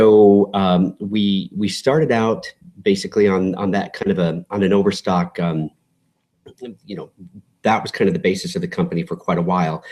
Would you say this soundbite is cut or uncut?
uncut